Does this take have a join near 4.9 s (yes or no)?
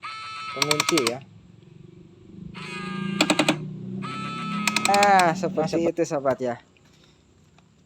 yes